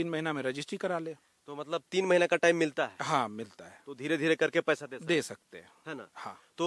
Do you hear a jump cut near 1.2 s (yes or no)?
no